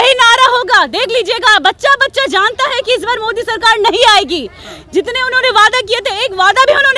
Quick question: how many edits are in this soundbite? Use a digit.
0